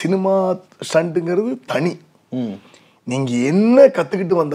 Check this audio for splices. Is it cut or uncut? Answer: uncut